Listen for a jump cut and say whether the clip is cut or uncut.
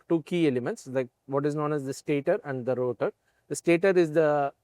uncut